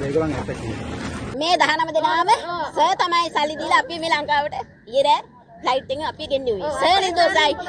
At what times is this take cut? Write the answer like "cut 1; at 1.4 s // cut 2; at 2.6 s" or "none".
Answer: cut 1; at 1.2 s